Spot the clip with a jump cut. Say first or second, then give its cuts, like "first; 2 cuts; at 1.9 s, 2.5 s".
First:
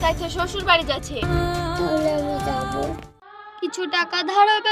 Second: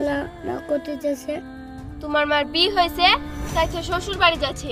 first; 1 cut; at 3.5 s